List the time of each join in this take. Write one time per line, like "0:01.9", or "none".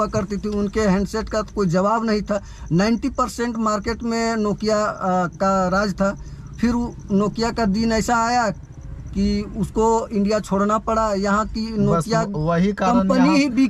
none